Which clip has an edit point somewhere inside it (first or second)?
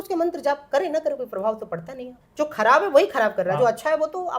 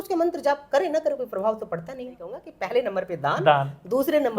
second